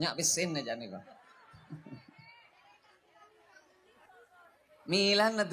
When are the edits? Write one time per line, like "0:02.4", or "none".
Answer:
0:04.0